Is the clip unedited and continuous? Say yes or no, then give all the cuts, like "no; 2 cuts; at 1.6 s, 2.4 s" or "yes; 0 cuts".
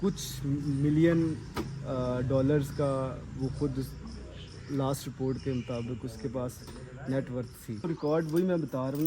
no; 1 cut; at 7.9 s